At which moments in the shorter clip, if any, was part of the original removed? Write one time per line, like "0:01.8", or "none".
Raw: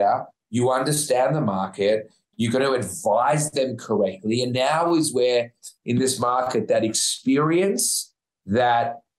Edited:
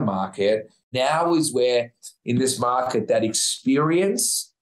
0:00.9